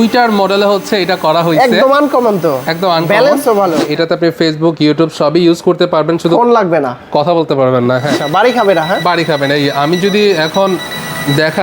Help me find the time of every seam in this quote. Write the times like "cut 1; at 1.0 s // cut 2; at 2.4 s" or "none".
cut 1; at 3.9 s // cut 2; at 8.2 s

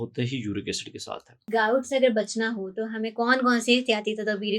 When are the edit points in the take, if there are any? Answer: cut 1; at 1.5 s

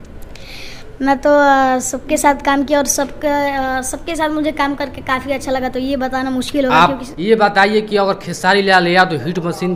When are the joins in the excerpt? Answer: cut 1; at 7.1 s

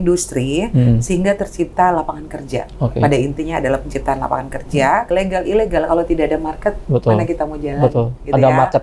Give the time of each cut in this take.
cut 1; at 5.1 s

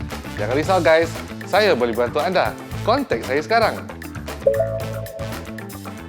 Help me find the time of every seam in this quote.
cut 1; at 5.2 s

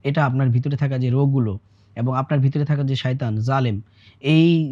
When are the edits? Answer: none

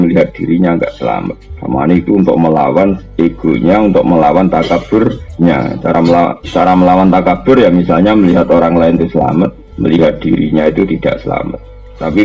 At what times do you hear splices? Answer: cut 1; at 5.2 s // cut 2; at 9.7 s

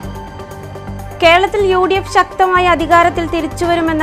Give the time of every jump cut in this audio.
cut 1; at 0.9 s

